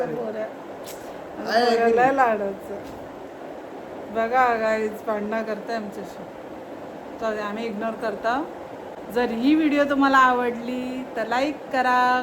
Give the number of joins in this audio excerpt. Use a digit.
1